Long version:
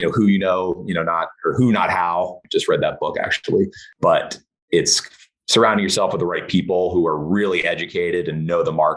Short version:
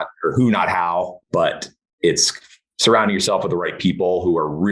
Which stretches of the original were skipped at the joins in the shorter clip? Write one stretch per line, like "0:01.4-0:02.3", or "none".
0:02.4-0:03.9